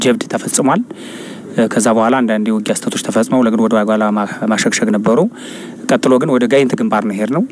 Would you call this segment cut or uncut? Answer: uncut